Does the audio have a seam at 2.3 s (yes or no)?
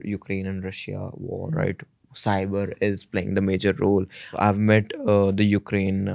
no